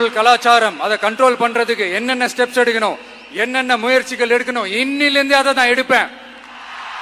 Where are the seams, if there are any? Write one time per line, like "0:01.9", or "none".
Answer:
none